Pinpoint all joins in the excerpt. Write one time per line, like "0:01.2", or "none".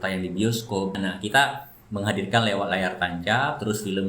0:00.9